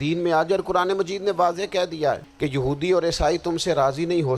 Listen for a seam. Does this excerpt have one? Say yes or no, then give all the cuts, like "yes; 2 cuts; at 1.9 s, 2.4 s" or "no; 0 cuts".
yes; 1 cut; at 2.3 s